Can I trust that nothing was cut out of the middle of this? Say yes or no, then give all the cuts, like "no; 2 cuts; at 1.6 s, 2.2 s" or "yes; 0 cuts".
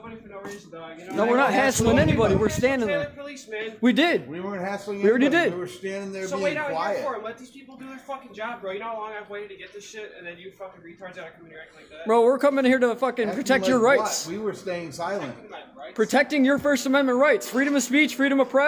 yes; 0 cuts